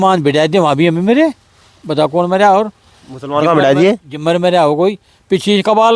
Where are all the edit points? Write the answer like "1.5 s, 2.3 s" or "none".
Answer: none